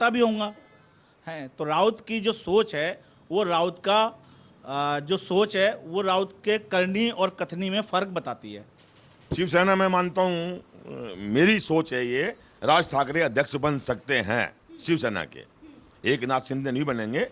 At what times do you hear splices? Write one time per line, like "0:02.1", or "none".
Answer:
0:09.2